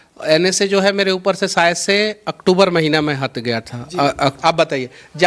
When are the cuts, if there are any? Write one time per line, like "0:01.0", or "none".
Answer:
0:04.4